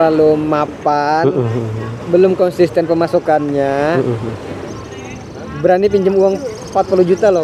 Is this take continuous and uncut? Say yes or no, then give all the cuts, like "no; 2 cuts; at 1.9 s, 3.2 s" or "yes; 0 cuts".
yes; 0 cuts